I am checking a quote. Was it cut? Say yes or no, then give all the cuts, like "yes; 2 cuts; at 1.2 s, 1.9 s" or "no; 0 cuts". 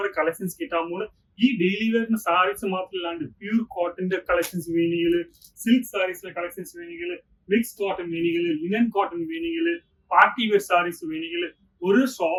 no; 0 cuts